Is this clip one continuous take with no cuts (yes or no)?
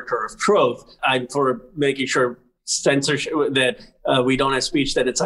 no